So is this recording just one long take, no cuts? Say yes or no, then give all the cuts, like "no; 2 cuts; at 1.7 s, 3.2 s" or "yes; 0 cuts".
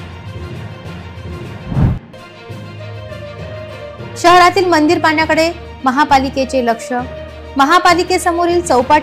no; 2 cuts; at 1.6 s, 2.0 s